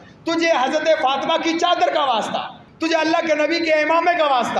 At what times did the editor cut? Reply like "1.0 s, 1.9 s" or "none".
2.6 s